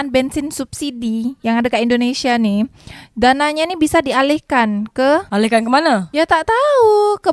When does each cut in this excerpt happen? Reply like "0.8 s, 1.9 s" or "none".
none